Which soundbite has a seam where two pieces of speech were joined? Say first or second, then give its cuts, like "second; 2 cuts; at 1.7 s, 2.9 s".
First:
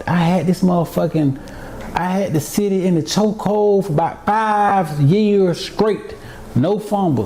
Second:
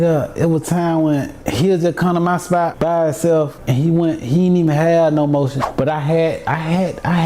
second; 4 cuts; at 1.4 s, 2.7 s, 3.6 s, 5.6 s